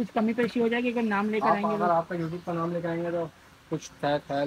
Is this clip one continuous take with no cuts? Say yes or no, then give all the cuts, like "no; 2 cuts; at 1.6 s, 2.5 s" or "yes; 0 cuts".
yes; 0 cuts